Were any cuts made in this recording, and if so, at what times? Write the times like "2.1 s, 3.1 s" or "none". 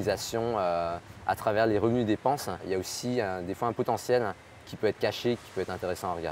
2.6 s, 5.4 s